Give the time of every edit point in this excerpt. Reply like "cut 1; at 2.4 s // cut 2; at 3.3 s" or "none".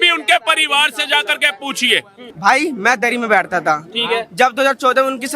cut 1; at 2.2 s